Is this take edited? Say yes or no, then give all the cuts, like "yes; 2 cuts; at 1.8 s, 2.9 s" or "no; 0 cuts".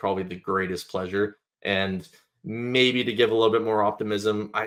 no; 0 cuts